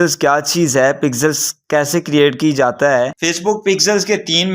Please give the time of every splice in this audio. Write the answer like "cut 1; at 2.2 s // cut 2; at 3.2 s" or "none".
cut 1; at 3.1 s